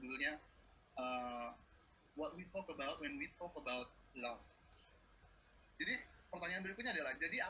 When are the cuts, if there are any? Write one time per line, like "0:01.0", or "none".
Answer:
0:05.1